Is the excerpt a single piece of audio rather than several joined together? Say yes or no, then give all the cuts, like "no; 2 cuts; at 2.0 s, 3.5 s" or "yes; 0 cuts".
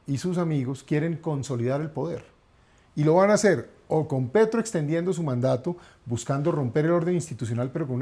yes; 0 cuts